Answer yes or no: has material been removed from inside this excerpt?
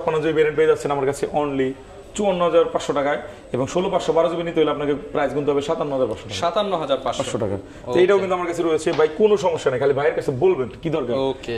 no